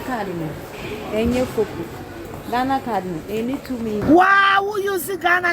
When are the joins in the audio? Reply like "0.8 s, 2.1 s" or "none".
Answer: 4.0 s